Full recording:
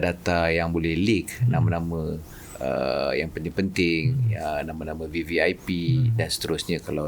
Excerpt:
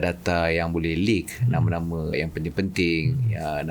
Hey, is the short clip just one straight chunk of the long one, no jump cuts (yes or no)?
no